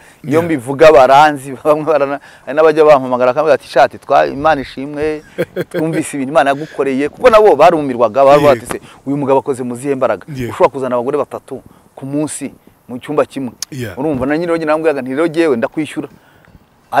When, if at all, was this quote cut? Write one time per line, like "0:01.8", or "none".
none